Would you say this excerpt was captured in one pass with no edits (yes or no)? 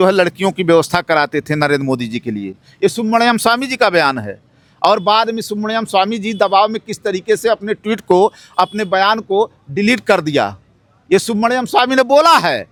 yes